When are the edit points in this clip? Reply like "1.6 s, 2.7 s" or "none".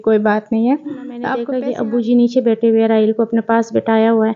1.4 s